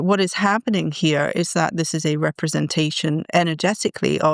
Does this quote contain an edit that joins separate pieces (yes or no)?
no